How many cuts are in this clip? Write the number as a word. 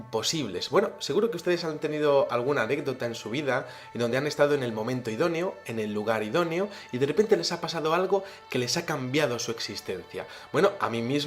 one